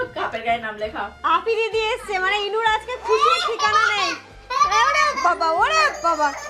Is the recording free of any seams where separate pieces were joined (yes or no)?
no